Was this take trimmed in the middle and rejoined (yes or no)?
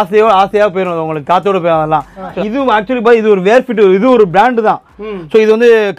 no